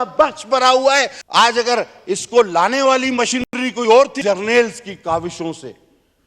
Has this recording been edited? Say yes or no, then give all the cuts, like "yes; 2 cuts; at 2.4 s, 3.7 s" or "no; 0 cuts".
yes; 2 cuts; at 1.2 s, 4.2 s